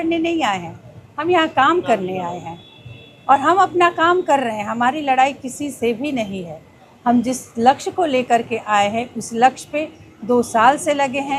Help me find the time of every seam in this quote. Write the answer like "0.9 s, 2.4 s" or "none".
none